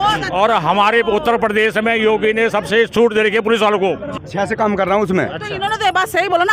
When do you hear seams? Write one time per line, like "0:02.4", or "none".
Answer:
0:04.1